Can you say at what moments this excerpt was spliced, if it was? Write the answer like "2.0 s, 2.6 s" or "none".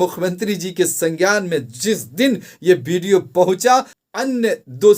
4.0 s